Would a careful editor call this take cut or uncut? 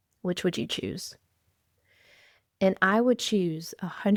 uncut